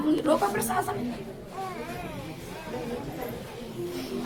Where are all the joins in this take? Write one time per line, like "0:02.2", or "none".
none